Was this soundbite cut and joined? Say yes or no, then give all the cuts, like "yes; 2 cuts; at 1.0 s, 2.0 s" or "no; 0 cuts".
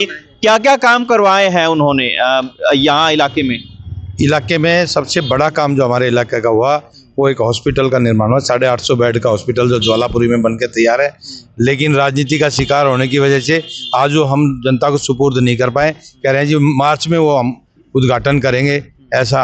no; 0 cuts